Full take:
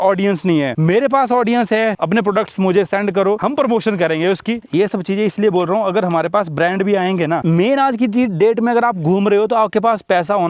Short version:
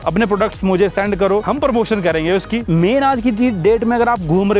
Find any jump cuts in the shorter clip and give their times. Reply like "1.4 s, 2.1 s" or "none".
2.7 s